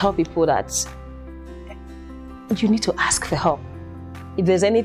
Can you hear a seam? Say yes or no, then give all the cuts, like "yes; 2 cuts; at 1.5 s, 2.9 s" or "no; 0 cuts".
no; 0 cuts